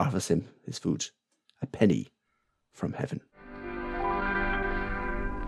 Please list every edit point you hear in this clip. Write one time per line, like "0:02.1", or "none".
0:03.4